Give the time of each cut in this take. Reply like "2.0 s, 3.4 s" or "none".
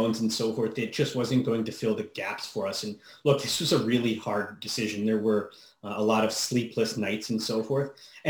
none